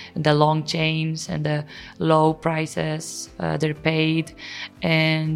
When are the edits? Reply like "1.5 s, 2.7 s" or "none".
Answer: none